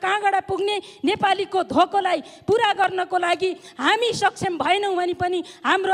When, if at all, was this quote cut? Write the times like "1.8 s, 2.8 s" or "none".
none